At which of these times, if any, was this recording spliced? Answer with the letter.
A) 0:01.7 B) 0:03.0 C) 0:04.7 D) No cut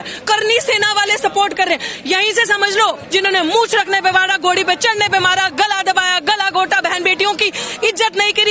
B